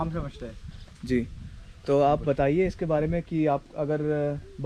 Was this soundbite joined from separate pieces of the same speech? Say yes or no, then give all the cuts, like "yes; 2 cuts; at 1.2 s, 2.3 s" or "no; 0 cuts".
no; 0 cuts